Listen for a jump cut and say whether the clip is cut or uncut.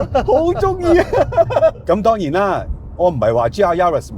cut